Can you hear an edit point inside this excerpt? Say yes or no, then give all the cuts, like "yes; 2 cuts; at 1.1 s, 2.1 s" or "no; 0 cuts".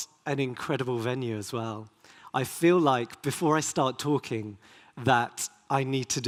no; 0 cuts